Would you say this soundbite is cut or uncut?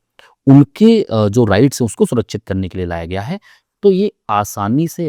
uncut